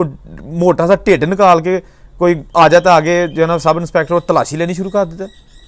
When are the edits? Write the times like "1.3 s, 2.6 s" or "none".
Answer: none